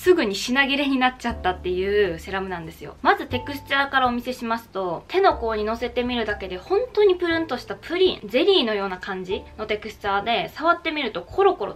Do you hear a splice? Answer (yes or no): no